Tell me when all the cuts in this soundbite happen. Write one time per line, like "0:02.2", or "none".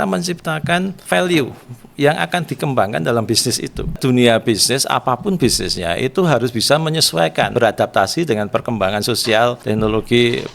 0:01.0
0:04.0
0:07.5
0:09.6